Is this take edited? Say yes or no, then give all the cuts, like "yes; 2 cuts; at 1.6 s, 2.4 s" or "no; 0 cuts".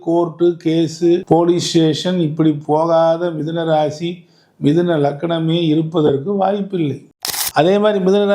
yes; 1 cut; at 7.0 s